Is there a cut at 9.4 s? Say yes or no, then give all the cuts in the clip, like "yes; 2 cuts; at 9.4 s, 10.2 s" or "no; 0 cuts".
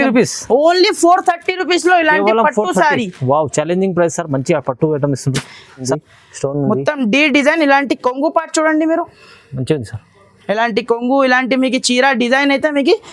no; 1 cut; at 5.9 s